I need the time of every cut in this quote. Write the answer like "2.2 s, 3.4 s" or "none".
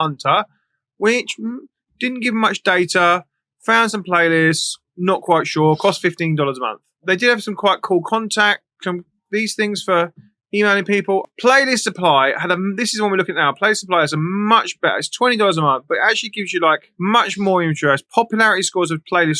none